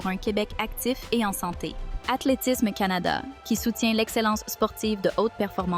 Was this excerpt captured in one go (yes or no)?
no